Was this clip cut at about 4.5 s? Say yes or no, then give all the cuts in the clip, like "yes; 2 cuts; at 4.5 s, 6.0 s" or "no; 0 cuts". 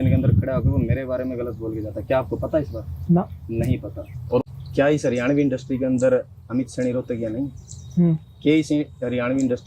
yes; 1 cut; at 4.5 s